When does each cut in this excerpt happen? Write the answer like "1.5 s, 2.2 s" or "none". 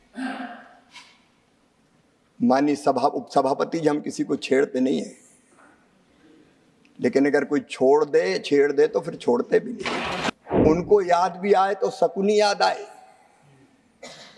10.3 s

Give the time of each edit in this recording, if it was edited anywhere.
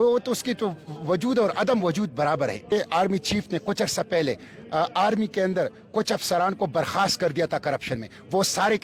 2.6 s

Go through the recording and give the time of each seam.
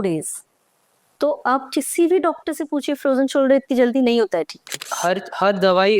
4.9 s

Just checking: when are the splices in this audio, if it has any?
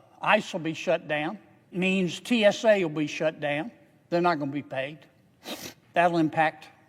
1.7 s

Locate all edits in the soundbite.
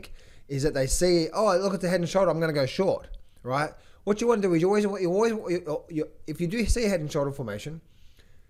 none

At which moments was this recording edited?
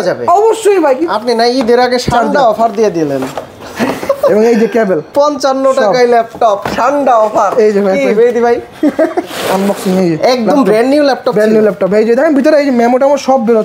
1.0 s, 5.1 s, 9.3 s

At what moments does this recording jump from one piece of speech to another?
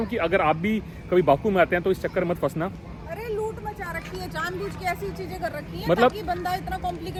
none

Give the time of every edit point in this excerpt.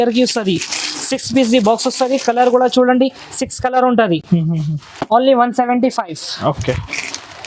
none

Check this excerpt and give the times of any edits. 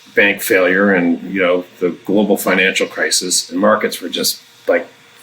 3.5 s

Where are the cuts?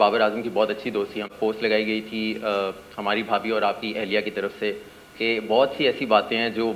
1.3 s

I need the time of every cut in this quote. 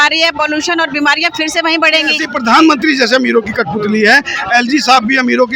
2.3 s

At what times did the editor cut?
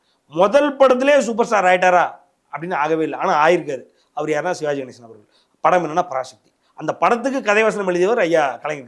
none

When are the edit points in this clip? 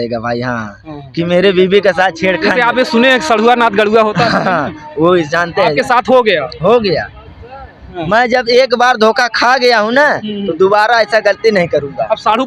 none

